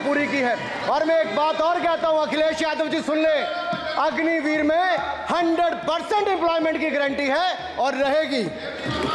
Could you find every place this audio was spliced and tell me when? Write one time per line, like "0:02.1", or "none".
none

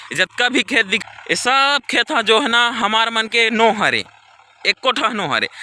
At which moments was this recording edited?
0:00.9

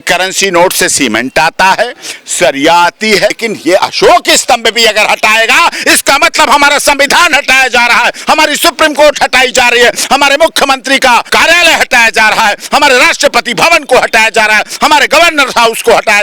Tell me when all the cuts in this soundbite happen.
0:03.4
0:11.3

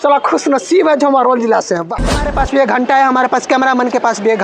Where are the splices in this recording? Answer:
0:02.3

